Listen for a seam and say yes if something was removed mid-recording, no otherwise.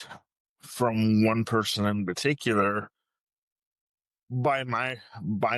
no